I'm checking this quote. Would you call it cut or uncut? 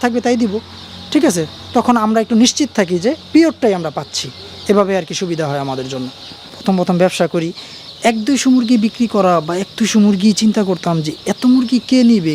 cut